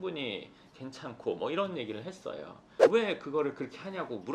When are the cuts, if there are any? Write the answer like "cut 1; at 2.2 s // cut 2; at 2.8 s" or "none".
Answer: cut 1; at 2.6 s